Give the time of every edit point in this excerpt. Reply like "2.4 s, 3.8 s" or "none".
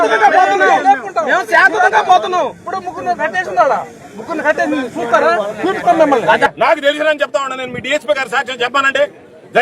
6.5 s

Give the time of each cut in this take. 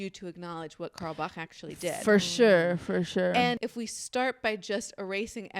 3.6 s

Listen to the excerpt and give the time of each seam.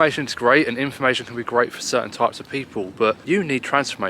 3.2 s

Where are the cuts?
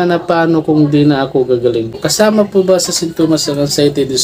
2.0 s

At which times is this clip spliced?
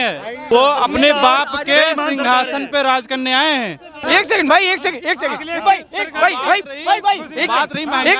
4.1 s

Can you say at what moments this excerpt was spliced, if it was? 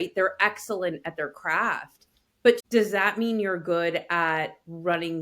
2.6 s

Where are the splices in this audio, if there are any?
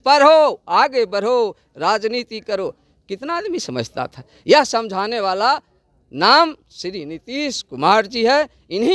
none

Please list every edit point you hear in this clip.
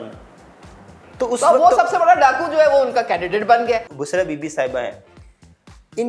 3.9 s

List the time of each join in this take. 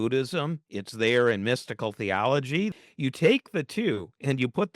2.7 s

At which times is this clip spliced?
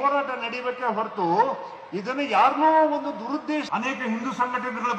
3.7 s

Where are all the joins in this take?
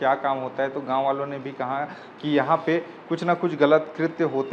none

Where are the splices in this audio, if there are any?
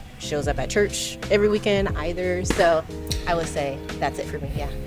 none

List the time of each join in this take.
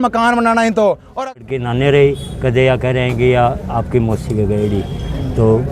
1.1 s

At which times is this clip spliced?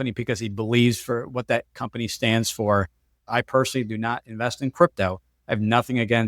3.2 s

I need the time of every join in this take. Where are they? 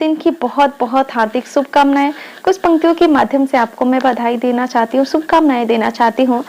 none

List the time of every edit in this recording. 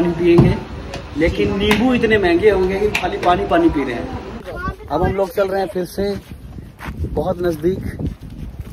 4.4 s

